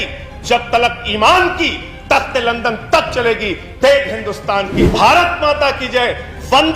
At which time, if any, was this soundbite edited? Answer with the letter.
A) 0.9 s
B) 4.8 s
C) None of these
B